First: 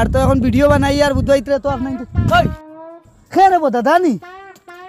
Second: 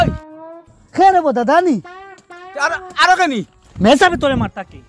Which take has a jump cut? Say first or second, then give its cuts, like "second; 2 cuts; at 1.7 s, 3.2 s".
second; 1 cut; at 3.7 s